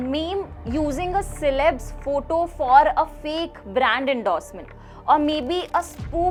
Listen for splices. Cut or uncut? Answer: uncut